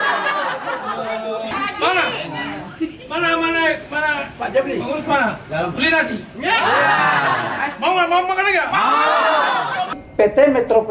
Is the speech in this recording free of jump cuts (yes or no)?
no